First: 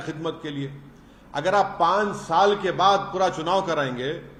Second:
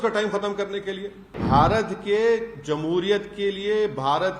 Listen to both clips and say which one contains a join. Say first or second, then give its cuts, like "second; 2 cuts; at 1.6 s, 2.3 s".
second; 1 cut; at 1.3 s